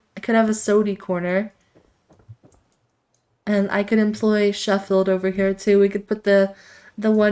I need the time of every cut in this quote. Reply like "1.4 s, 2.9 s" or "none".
none